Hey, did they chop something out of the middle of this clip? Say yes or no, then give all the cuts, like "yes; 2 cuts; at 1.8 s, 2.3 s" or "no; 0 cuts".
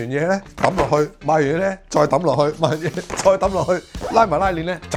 no; 0 cuts